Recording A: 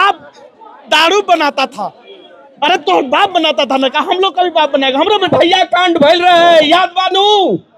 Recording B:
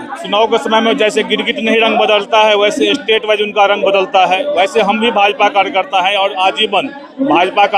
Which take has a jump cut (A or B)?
A